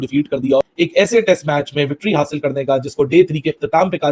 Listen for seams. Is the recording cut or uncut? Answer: uncut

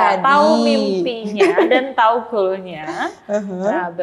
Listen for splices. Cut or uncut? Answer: uncut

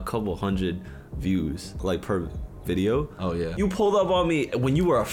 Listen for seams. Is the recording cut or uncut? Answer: cut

